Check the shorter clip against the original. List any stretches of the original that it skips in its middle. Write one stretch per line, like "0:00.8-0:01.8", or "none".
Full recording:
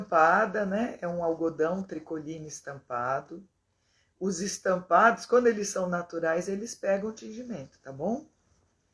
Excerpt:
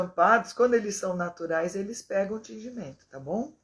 none